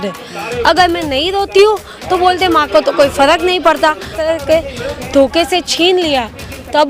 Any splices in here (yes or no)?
yes